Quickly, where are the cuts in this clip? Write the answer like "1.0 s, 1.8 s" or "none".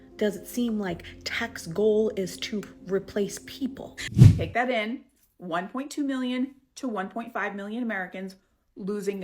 4.0 s